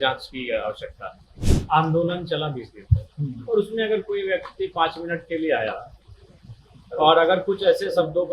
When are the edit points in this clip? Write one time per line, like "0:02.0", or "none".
0:01.4